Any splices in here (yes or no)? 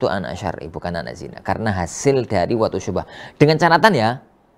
no